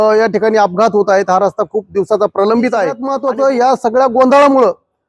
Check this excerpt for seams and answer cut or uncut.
cut